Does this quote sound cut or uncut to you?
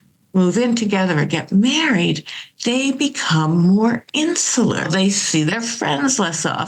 cut